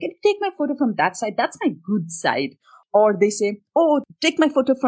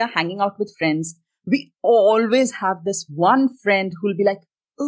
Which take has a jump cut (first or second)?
first